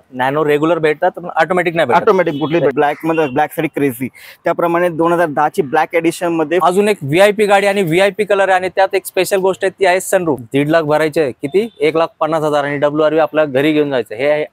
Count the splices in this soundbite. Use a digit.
3